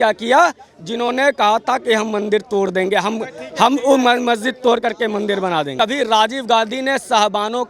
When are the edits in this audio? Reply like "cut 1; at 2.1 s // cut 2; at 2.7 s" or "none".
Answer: cut 1; at 5.7 s